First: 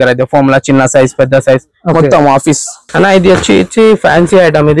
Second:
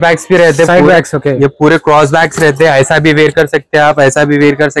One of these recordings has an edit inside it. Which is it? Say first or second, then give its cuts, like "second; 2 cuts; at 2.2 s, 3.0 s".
first; 1 cut; at 2.7 s